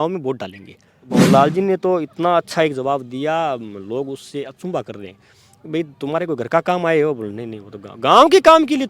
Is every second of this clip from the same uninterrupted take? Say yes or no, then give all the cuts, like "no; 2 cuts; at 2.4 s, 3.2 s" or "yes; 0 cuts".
no; 1 cut; at 1.1 s